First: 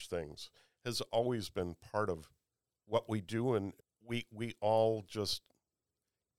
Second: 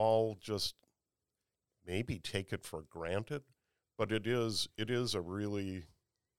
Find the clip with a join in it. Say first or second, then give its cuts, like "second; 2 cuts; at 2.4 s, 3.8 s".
first; 1 cut; at 3.7 s